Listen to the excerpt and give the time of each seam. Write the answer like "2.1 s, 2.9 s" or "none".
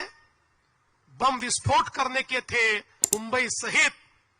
3.1 s